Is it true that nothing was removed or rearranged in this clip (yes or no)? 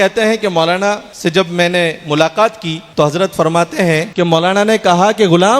no